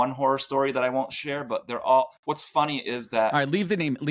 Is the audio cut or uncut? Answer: uncut